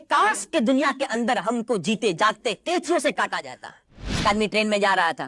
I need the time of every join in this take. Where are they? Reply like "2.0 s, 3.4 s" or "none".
4.2 s